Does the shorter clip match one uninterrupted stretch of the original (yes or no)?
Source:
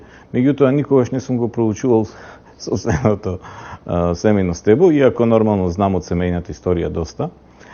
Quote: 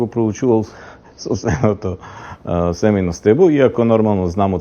yes